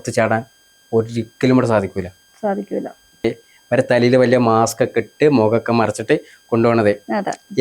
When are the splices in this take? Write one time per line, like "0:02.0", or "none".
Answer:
0:03.3